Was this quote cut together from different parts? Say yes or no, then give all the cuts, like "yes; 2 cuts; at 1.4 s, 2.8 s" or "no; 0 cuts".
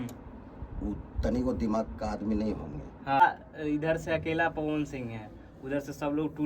yes; 1 cut; at 3.2 s